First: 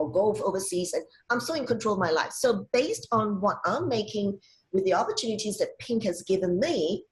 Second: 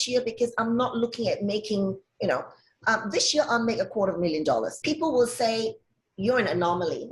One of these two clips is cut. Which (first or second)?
second